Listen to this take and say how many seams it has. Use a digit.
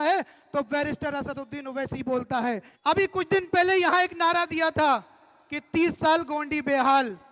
1